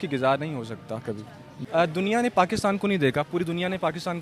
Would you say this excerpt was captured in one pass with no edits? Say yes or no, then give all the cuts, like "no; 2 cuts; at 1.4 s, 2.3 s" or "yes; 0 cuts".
no; 1 cut; at 1.5 s